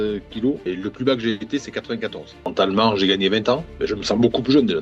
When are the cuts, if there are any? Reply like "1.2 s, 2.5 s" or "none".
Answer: 2.3 s, 3.7 s